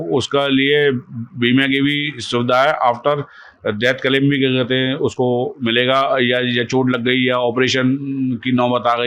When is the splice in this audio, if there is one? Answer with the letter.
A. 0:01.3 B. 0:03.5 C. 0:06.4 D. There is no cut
D